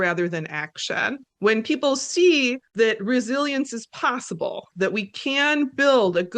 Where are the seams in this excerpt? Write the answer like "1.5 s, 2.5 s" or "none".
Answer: 1.3 s, 2.6 s